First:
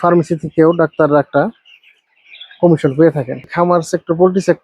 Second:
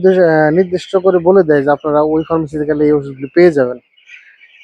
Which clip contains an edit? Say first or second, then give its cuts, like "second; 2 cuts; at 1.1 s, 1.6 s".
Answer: first; 1 cut; at 3.5 s